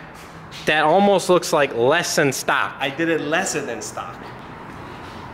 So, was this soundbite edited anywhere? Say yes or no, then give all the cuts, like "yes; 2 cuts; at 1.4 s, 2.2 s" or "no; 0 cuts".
yes; 1 cut; at 4.4 s